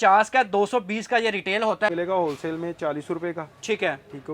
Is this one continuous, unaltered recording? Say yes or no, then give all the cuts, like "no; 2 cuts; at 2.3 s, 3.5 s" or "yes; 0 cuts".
no; 1 cut; at 1.9 s